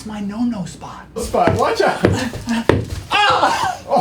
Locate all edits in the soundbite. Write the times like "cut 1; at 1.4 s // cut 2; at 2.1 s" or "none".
cut 1; at 1.2 s